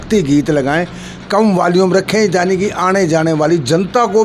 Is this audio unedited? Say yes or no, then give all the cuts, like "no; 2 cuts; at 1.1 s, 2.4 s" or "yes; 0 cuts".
yes; 0 cuts